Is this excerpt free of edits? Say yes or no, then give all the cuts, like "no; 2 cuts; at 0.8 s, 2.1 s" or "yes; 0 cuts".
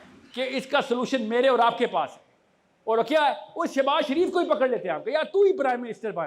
yes; 0 cuts